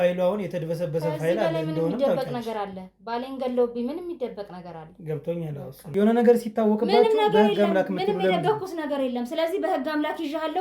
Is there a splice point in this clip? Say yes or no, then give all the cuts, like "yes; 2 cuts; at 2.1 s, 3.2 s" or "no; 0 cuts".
yes; 1 cut; at 5.8 s